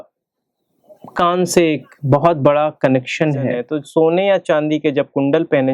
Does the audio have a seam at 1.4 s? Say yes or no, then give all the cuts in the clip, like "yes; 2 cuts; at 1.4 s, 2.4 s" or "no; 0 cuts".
no; 1 cut; at 3.7 s